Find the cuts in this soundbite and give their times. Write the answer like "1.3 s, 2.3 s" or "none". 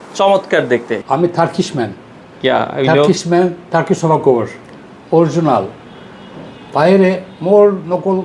none